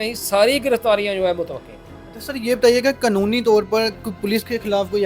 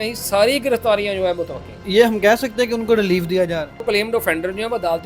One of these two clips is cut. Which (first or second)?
second